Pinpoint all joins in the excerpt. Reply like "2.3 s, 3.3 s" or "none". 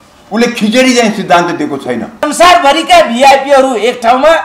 2.3 s